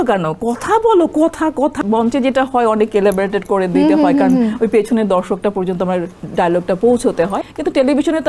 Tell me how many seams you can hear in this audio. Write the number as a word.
two